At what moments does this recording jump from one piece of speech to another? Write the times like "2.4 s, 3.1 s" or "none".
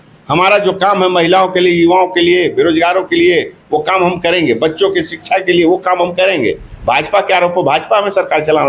none